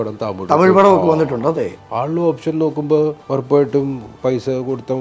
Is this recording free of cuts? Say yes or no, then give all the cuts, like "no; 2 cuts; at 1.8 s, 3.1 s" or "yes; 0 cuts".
no; 3 cuts; at 1.8 s, 3.2 s, 4.1 s